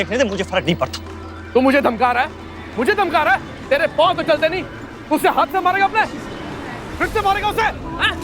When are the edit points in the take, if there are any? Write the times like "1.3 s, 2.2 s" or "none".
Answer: 1.4 s